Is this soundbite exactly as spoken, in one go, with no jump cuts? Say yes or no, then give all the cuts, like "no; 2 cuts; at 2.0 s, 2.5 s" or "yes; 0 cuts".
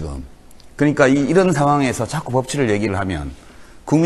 no; 1 cut; at 2.5 s